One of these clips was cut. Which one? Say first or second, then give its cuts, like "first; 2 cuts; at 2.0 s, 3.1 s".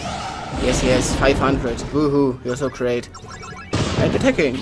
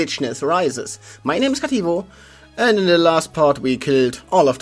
first; 1 cut; at 3.2 s